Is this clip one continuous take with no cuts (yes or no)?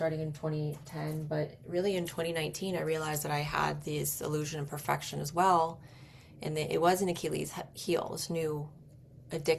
yes